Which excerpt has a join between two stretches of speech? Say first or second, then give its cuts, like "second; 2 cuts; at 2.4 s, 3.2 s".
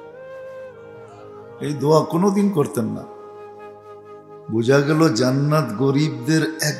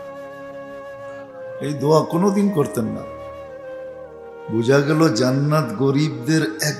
first; 2 cuts; at 3.0 s, 4.5 s